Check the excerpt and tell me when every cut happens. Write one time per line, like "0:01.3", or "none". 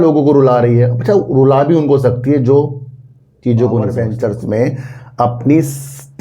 0:04.0